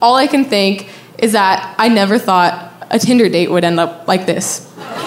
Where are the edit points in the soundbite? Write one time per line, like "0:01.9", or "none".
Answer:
none